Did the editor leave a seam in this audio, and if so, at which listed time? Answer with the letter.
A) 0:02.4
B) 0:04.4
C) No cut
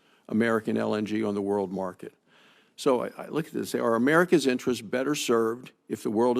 B